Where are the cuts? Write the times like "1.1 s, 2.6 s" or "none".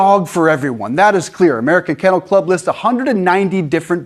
none